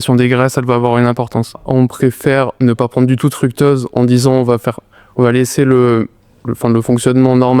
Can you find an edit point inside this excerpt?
yes; 1 cut; at 1.6 s

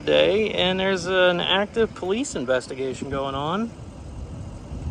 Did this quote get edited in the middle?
no; 0 cuts

